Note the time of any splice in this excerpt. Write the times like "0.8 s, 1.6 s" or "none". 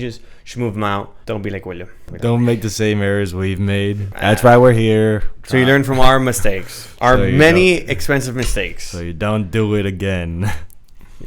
1.1 s, 2.0 s, 4.1 s, 5.3 s